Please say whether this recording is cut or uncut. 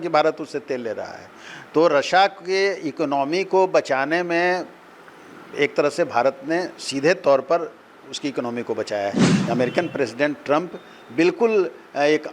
cut